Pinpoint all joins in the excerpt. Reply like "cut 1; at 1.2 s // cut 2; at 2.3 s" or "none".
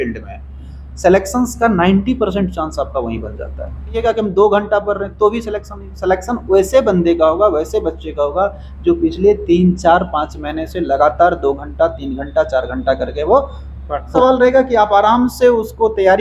cut 1; at 4.0 s // cut 2; at 14.2 s